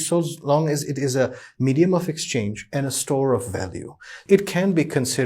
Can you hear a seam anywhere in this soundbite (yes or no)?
yes